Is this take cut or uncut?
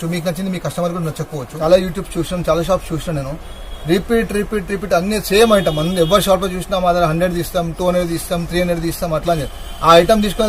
cut